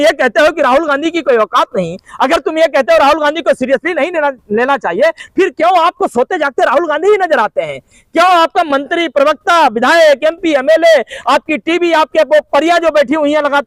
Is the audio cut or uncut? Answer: uncut